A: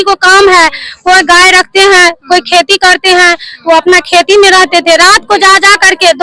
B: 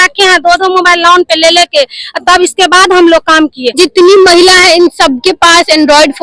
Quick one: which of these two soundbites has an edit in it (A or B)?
B